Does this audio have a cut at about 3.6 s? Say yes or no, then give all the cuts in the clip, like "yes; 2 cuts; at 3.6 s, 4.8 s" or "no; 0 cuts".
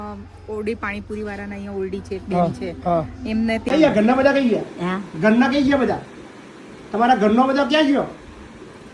yes; 1 cut; at 3.6 s